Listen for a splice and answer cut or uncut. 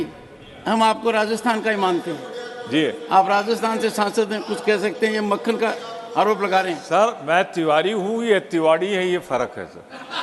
uncut